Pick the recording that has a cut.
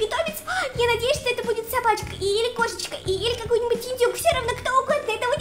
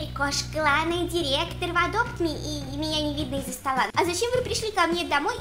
second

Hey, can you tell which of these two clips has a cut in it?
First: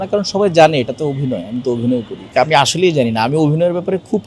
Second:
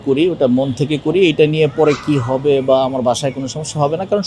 first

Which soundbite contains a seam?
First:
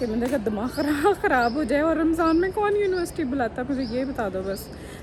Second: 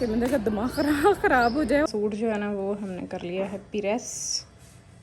second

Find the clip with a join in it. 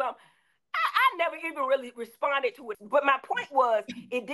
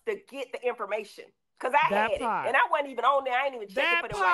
first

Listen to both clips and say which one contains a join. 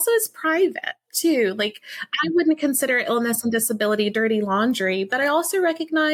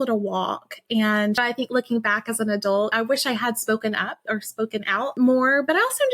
second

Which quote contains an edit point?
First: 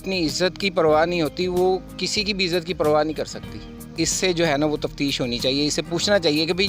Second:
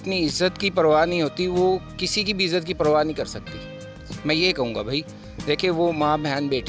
first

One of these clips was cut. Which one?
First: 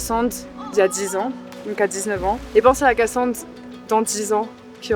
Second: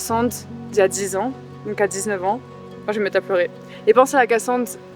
first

